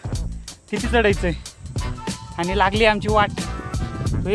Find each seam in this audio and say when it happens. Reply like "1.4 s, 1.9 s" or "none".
none